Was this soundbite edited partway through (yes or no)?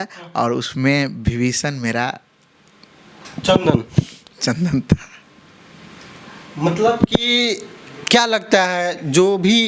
no